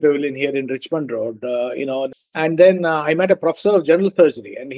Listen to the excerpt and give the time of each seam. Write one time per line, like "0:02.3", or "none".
0:02.2

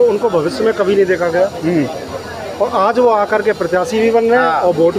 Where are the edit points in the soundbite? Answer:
none

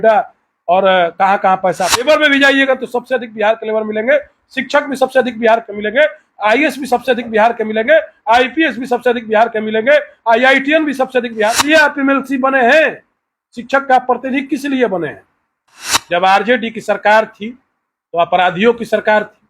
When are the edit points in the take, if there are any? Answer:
0:02.0
0:11.6
0:15.8

